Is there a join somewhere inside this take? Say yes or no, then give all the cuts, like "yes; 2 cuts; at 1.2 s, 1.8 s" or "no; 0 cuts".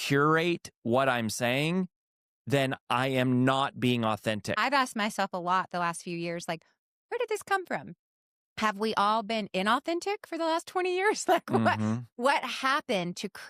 yes; 1 cut; at 4.6 s